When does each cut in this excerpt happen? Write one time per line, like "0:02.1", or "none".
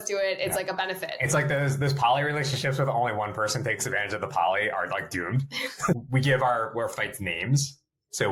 0:05.9